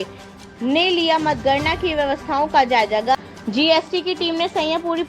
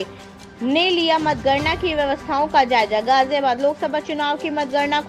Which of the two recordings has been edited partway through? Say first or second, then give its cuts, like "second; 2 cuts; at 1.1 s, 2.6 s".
first; 1 cut; at 3.1 s